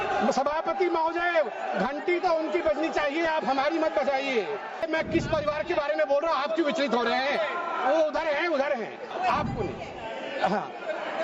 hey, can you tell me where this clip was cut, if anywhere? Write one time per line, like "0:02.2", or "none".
0:04.9
0:09.1